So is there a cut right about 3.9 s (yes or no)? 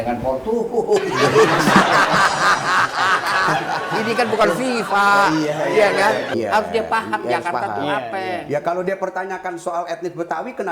no